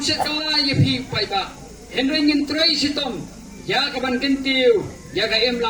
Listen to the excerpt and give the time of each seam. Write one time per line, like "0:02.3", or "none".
none